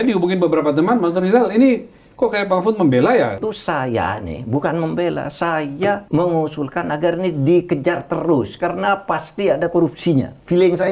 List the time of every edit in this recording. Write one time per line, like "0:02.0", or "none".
0:03.4
0:06.0